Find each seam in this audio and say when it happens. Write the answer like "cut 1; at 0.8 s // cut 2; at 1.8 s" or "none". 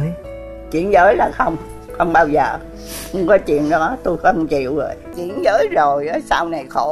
cut 1; at 5.2 s